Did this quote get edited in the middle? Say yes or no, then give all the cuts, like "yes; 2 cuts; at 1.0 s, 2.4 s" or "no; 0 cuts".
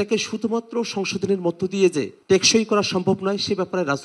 yes; 1 cut; at 2.2 s